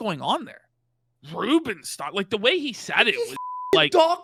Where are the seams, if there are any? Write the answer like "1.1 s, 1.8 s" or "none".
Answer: none